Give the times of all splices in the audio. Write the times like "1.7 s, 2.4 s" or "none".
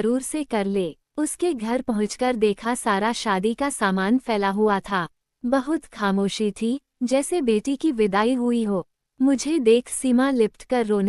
1.0 s